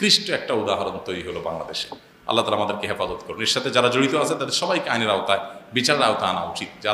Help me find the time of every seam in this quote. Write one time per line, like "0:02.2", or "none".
none